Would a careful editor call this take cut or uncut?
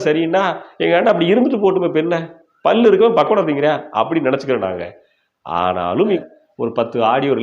cut